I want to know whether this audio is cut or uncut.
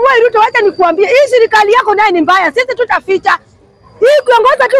uncut